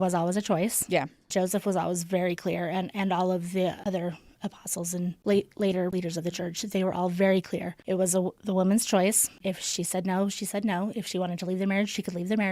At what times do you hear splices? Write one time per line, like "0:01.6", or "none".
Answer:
0:03.8
0:05.2
0:05.9
0:07.8
0:09.3